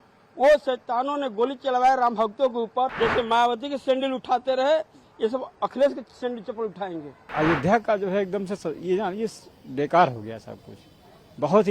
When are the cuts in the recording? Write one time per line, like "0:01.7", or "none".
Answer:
0:02.9
0:07.3